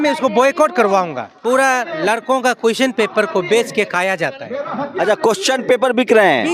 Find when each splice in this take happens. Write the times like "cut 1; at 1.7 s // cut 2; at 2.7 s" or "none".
cut 1; at 1.2 s